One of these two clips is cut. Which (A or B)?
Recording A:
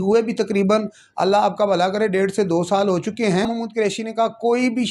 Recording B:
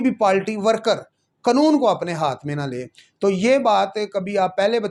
A